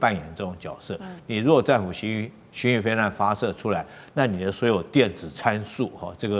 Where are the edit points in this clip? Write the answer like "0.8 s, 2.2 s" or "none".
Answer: none